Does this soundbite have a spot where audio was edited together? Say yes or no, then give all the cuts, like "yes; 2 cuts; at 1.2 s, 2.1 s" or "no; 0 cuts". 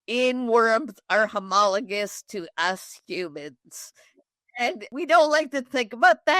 yes; 1 cut; at 4.9 s